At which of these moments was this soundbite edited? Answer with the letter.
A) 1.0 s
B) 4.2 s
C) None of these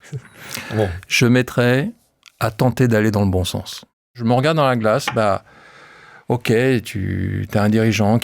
B